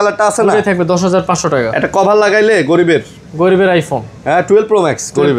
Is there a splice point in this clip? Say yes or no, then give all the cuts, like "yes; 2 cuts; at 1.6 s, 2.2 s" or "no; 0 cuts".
no; 0 cuts